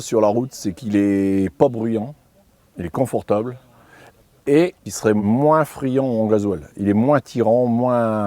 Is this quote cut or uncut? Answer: cut